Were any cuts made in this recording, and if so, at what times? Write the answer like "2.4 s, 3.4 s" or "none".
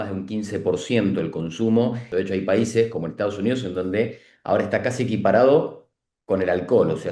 2.0 s